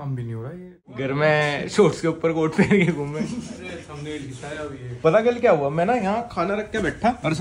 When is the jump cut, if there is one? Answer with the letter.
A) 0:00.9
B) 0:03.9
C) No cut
A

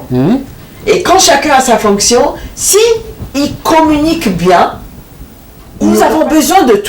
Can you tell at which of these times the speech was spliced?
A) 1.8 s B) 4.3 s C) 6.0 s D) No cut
C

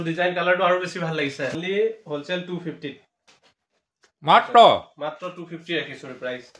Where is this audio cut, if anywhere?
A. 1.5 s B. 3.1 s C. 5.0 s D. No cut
A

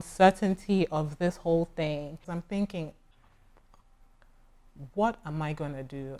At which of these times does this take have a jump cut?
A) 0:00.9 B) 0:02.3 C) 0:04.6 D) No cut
B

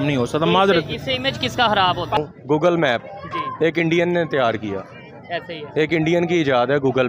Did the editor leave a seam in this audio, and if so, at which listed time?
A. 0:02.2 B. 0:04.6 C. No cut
A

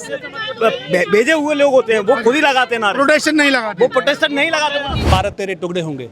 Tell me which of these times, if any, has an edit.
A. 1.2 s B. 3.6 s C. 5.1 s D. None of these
C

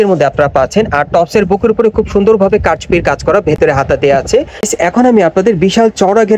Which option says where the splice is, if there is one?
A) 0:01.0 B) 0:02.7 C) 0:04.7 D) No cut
C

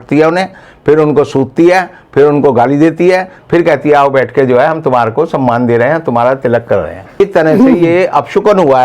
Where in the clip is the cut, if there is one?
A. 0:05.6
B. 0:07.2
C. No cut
B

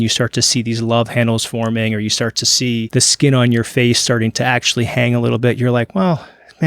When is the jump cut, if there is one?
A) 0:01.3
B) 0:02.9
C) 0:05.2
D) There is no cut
B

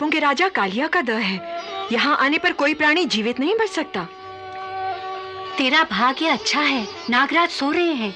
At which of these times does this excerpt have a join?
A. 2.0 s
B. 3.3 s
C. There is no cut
C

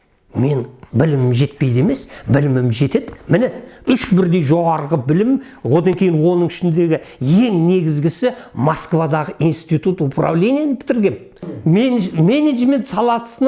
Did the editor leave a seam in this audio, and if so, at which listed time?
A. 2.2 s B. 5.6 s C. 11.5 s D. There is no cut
C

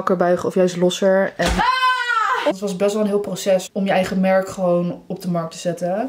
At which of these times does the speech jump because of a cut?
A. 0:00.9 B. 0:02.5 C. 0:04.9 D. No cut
B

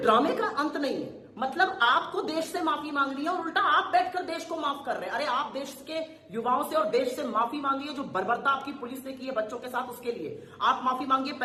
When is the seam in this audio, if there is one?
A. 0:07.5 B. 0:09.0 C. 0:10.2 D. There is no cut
D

